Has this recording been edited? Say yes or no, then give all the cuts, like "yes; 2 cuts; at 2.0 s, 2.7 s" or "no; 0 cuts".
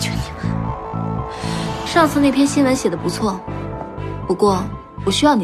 yes; 1 cut; at 1.8 s